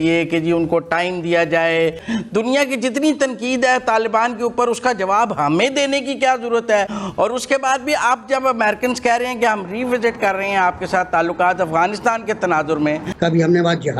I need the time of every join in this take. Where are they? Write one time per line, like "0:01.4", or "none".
0:02.0
0:07.0
0:13.1